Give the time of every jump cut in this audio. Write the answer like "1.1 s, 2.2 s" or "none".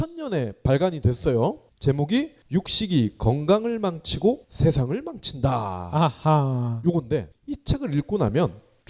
1.2 s